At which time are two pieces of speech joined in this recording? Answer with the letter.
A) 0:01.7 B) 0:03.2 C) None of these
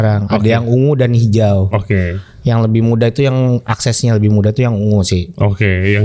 C